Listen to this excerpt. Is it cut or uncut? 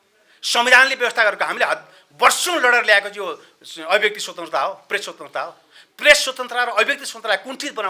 uncut